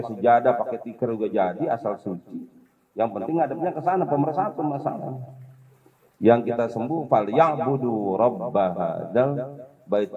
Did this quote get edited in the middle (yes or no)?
no